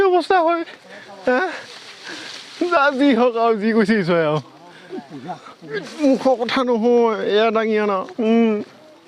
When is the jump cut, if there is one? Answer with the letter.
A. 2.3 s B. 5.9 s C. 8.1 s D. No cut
B